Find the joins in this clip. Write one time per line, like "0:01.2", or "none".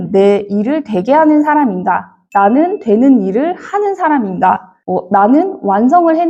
none